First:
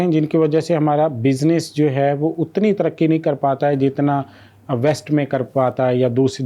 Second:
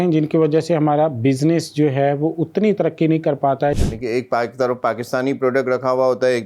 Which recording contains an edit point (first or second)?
second